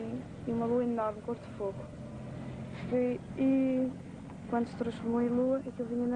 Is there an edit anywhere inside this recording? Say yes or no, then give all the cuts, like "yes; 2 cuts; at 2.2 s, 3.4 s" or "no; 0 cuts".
yes; 1 cut; at 3.5 s